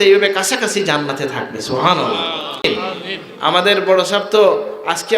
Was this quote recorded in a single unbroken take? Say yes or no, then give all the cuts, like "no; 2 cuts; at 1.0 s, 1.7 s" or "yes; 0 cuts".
no; 1 cut; at 2.6 s